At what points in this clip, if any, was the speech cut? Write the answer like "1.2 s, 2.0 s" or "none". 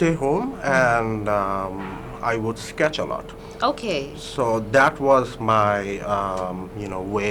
none